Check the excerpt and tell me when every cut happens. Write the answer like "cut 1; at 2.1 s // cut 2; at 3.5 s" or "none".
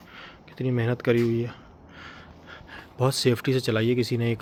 none